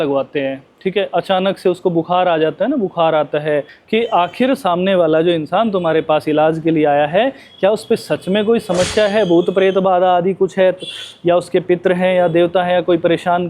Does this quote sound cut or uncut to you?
cut